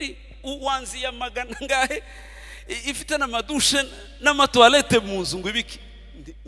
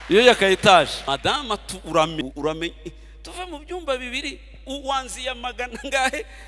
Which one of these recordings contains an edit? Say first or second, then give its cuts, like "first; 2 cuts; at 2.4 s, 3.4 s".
second; 2 cuts; at 1.0 s, 2.2 s